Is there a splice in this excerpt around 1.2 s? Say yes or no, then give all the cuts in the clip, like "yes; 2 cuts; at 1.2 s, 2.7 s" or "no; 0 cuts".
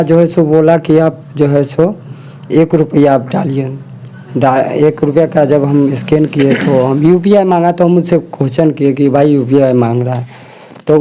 no; 0 cuts